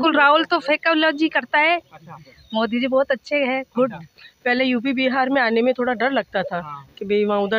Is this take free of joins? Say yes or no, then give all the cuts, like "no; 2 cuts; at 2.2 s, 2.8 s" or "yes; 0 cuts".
yes; 0 cuts